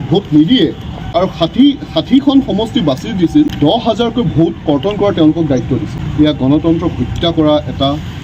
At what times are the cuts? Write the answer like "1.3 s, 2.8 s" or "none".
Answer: 1.1 s, 3.5 s, 6.0 s